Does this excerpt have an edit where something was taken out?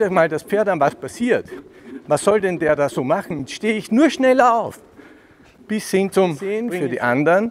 yes; 1 cut; at 6.6 s

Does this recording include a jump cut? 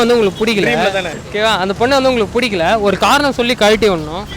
yes; 1 cut; at 1.1 s

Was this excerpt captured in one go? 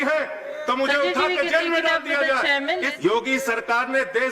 no; 1 cut; at 2.9 s

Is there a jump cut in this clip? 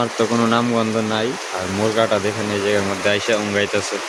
no; 0 cuts

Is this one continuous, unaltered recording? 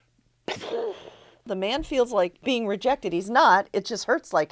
no; 2 cuts; at 1.5 s, 2.4 s

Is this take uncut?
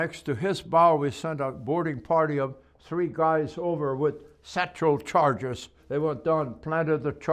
no; 1 cut; at 5.8 s

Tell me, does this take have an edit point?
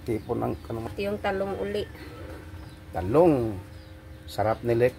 no; 0 cuts

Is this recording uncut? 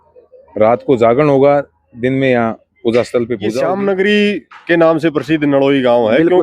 no; 1 cut; at 3.5 s

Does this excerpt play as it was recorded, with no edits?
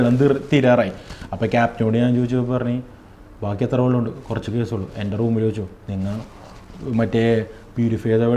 yes; 0 cuts

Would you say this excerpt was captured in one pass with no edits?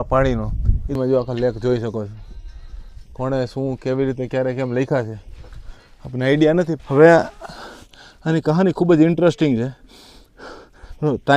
no; 2 cuts; at 1.0 s, 6.8 s

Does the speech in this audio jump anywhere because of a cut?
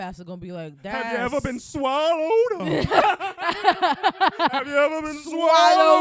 no; 0 cuts

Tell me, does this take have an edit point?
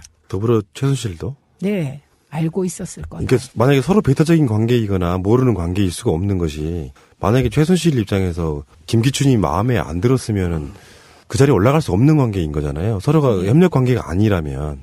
yes; 1 cut; at 8.1 s

